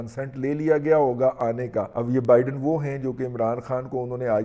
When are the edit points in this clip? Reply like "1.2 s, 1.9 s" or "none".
1.9 s